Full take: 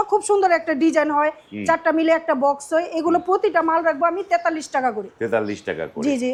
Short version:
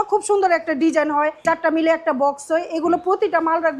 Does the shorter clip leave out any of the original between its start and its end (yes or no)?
yes